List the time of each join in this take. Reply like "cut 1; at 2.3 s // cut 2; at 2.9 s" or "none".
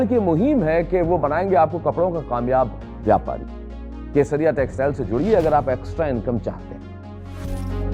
none